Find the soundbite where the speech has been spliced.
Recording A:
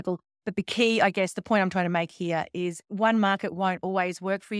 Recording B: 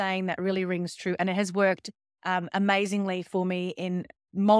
A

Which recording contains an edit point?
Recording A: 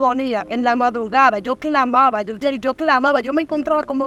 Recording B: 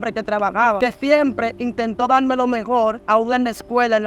B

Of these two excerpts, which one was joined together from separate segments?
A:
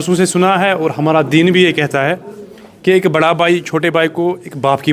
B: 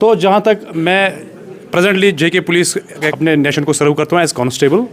B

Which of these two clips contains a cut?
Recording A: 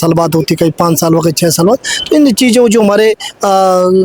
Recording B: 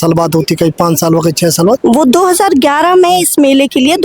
B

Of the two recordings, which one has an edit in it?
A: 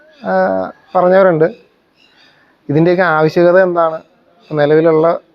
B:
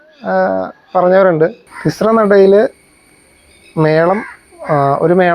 B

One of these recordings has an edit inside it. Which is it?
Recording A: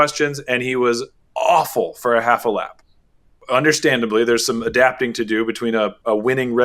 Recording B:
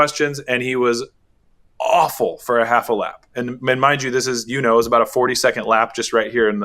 A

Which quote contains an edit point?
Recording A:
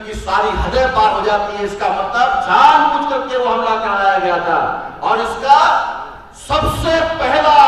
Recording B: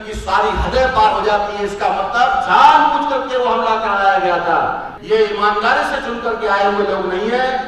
B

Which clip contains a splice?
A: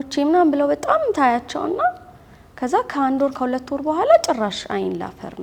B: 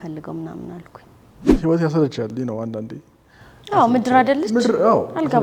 B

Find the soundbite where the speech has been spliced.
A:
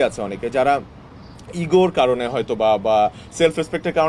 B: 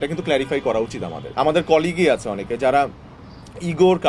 B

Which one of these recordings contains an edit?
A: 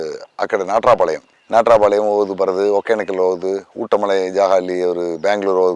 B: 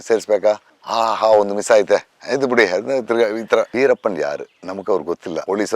B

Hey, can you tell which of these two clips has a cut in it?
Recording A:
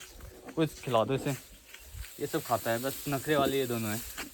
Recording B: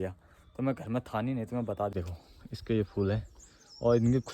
B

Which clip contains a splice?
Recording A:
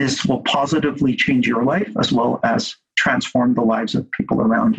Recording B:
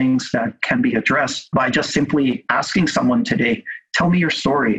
B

